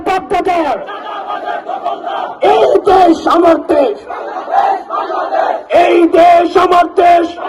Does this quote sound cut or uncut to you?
uncut